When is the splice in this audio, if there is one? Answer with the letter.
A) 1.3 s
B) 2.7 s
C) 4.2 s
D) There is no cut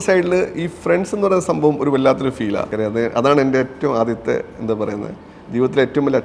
B